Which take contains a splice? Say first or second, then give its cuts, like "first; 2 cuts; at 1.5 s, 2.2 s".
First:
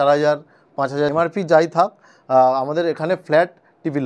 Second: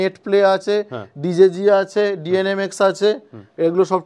first; 1 cut; at 1.1 s